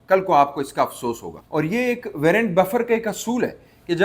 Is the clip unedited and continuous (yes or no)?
yes